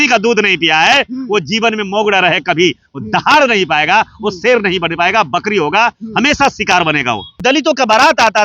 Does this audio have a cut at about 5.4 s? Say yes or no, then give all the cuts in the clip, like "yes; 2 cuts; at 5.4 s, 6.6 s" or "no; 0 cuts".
no; 1 cut; at 7.4 s